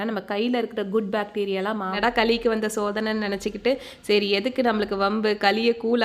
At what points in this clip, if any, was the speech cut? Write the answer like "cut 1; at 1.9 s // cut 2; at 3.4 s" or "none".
cut 1; at 2.0 s